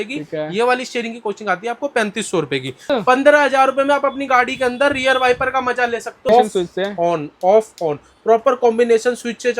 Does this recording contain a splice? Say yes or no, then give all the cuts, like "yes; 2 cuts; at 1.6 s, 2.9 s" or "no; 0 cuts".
yes; 2 cuts; at 2.8 s, 6.3 s